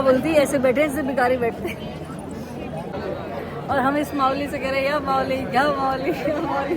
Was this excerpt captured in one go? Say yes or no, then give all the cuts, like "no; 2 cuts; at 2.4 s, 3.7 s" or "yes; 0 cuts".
no; 1 cut; at 2.9 s